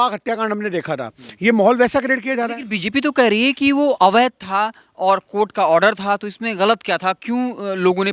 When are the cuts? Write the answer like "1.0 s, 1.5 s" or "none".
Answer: none